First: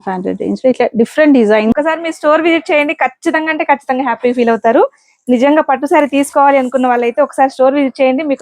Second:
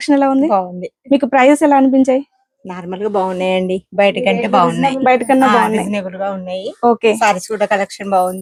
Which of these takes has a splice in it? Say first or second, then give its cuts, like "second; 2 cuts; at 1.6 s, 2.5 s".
first; 1 cut; at 1.7 s